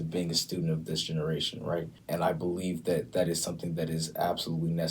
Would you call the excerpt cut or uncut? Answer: cut